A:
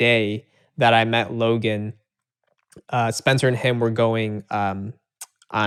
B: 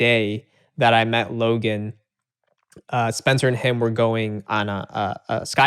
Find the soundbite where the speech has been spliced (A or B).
B